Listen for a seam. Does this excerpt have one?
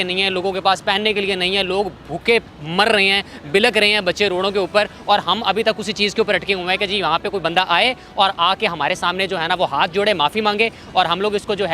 no; 0 cuts

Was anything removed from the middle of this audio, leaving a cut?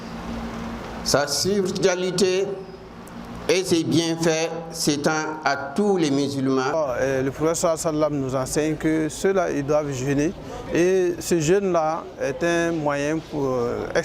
yes; 1 cut; at 6.7 s

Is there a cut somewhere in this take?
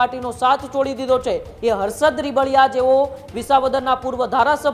yes; 1 cut; at 1.5 s

